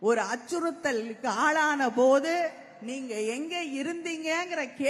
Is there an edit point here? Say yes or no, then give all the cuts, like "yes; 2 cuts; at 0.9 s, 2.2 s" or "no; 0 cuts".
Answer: no; 0 cuts